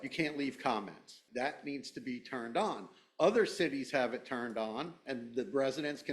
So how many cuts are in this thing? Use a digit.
1